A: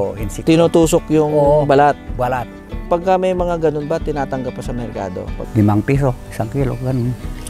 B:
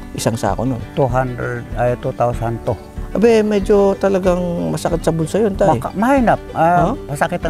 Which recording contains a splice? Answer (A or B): A